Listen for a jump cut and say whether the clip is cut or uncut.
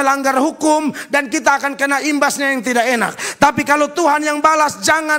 uncut